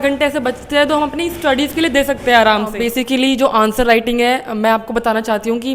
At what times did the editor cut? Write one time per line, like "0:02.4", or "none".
0:02.8

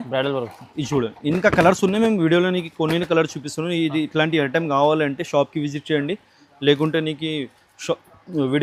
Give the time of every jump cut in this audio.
none

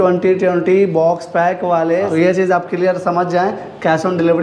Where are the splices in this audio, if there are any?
0:02.1

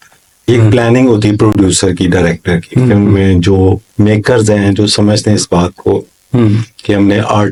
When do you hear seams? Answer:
none

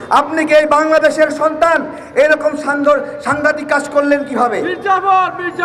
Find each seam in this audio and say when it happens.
none

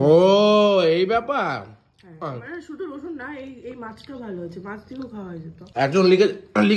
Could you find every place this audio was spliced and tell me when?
0:05.6

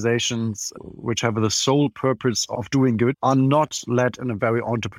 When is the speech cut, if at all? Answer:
0:01.0
0:03.2

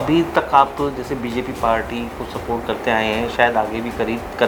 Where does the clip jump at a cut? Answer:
none

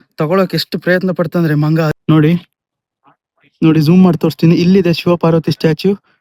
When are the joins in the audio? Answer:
0:02.0

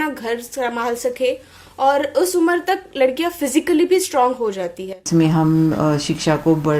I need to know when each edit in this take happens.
0:05.1

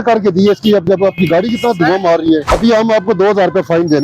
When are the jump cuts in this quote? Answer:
0:02.5

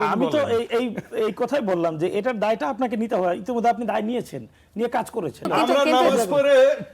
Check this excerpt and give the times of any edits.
0:05.5

